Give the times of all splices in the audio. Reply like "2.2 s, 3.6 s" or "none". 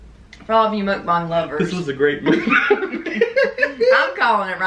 none